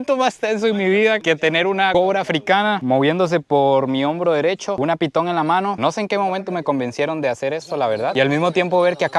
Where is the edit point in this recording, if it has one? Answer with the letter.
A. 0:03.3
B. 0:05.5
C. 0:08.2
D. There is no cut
D